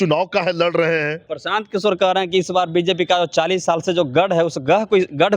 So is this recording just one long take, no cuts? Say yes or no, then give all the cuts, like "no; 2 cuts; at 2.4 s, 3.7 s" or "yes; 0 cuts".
no; 1 cut; at 1.3 s